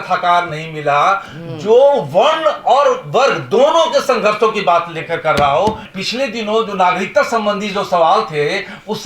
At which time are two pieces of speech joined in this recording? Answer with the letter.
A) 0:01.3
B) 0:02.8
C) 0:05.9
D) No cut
C